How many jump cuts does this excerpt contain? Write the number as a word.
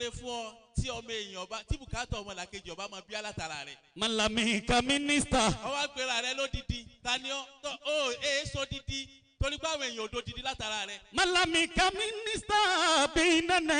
zero